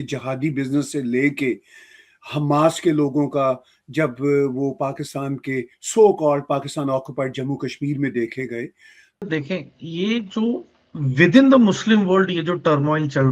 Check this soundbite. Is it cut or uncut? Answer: cut